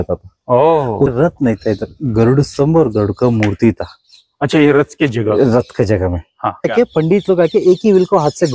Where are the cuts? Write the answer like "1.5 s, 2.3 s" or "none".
1.1 s, 6.7 s